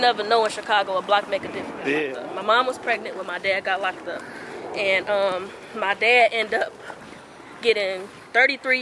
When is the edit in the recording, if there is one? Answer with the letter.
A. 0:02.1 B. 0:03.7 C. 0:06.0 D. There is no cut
A